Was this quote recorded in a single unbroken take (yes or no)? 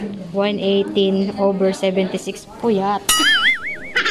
yes